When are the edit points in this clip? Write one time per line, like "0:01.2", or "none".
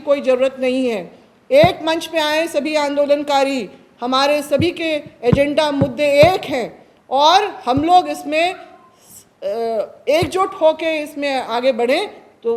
none